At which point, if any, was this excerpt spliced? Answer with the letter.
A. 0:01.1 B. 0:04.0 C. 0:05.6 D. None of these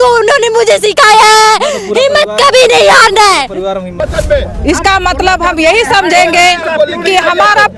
B